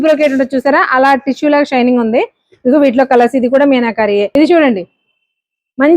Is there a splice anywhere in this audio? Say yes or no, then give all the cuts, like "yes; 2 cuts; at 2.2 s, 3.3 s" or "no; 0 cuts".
yes; 1 cut; at 4.3 s